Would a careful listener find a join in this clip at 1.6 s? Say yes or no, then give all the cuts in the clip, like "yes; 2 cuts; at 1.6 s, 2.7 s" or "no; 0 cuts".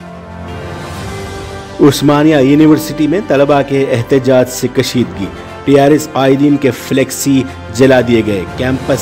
yes; 1 cut; at 1.6 s